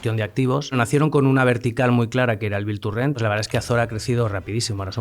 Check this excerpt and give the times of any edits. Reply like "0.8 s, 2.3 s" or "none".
0.8 s, 3.2 s

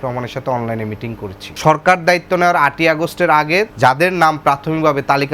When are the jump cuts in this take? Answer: 1.4 s, 3.7 s

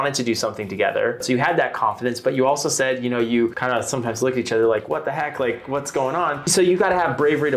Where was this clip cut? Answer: 1.2 s, 3.6 s, 6.5 s

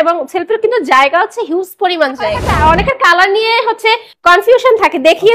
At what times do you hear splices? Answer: 2.5 s

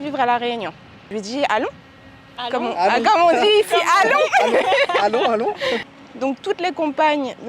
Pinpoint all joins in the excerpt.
1.1 s, 6.0 s

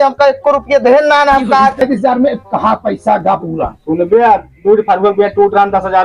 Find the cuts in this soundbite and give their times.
1.8 s

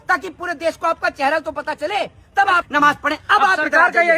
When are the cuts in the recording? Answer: 2.7 s

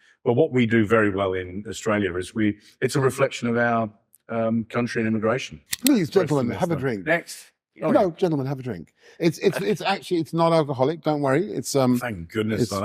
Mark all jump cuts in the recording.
5.6 s

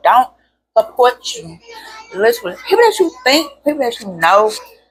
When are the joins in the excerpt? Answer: none

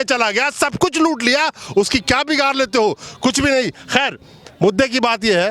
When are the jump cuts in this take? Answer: none

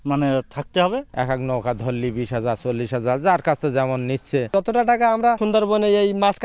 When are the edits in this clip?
1.1 s, 4.5 s, 5.4 s

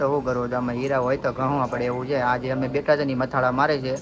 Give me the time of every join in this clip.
none

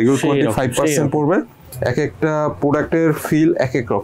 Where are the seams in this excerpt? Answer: 1.6 s

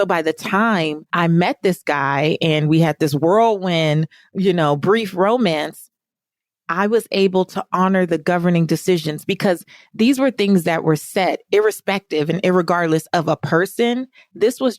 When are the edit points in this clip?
1.0 s

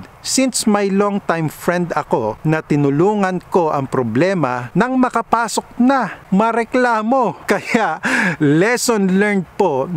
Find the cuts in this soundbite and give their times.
2.4 s, 4.6 s, 6.2 s, 7.4 s

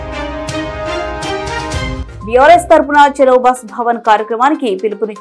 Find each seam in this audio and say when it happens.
2.0 s

